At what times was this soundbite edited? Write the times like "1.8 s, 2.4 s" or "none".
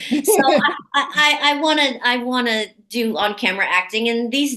none